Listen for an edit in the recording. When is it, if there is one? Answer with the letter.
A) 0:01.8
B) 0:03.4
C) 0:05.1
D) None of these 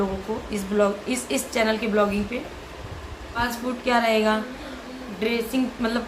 B